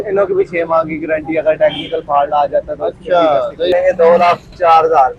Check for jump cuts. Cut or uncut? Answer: cut